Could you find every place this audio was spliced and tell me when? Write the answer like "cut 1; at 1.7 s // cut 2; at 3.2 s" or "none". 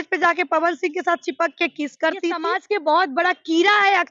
cut 1; at 2.5 s